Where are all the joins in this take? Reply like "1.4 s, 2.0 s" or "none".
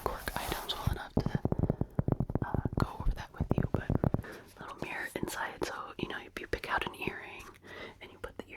4.2 s